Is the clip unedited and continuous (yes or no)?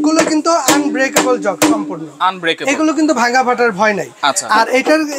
yes